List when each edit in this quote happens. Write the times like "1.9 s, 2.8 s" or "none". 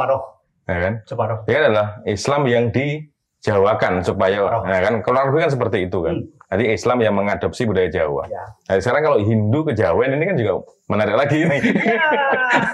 none